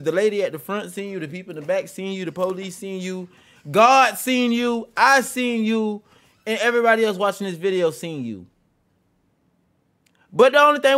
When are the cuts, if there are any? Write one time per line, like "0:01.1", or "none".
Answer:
none